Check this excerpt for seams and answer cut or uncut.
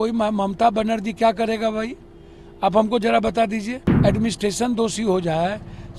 cut